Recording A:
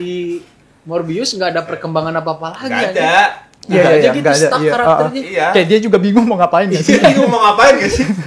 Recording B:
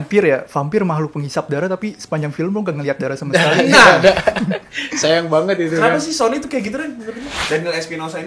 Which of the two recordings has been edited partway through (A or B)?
B